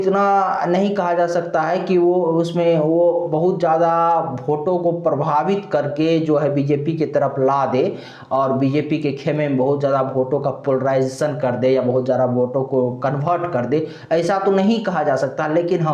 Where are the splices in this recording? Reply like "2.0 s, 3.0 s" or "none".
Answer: none